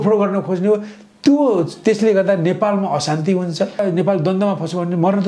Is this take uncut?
no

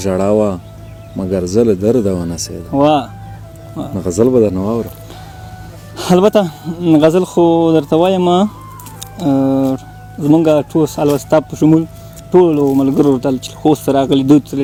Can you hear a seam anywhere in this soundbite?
no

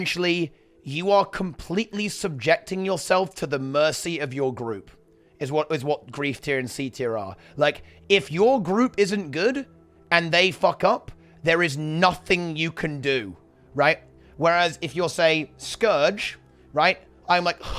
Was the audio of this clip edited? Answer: no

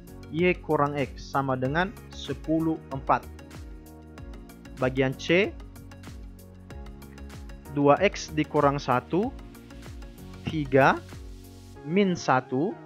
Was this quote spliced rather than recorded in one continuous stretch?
no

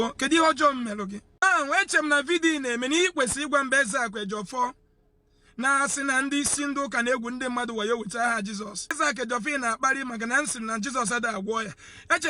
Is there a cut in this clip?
yes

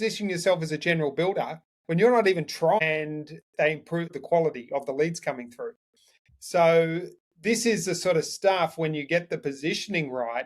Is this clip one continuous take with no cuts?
no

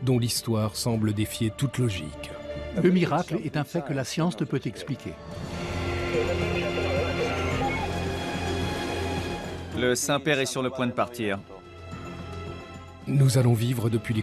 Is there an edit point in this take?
no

